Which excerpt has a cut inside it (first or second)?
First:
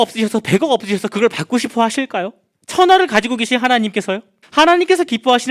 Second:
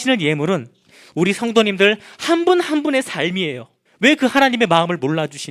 first